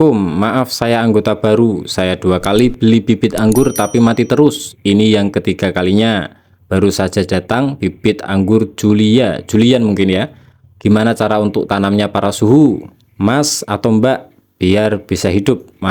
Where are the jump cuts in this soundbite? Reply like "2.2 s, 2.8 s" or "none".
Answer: none